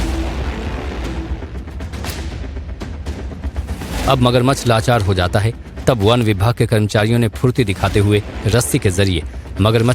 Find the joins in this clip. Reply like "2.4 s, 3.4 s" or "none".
none